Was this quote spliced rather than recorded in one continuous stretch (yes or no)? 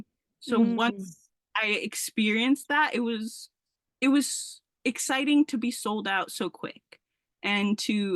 no